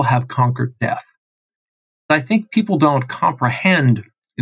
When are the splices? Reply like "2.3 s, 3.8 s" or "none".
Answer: 2.1 s